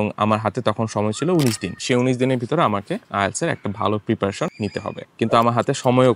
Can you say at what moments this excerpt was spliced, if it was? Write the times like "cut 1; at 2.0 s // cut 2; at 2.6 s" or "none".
cut 1; at 1.7 s // cut 2; at 4.7 s

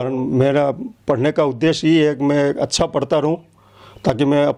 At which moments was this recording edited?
none

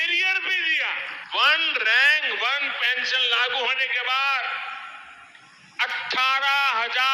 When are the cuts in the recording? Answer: cut 1; at 1.2 s

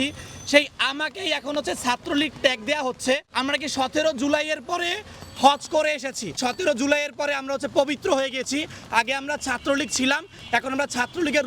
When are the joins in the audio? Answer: cut 1; at 3.3 s // cut 2; at 6.3 s

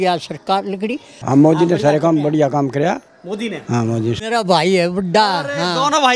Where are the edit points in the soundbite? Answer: cut 1; at 1.2 s // cut 2; at 4.2 s

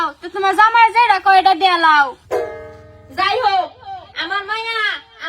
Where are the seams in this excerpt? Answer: cut 1; at 2.2 s

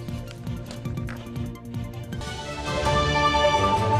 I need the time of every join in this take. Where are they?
cut 1; at 0.9 s

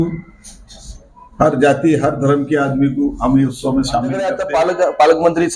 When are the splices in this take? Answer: cut 1; at 4.4 s

